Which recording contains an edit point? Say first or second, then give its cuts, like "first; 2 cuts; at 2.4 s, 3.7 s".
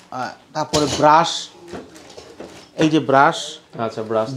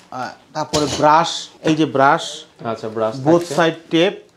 second; 1 cut; at 1.4 s